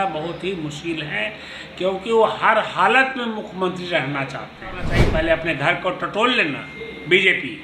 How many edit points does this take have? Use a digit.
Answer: 1